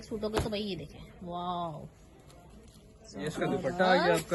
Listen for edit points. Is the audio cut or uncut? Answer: uncut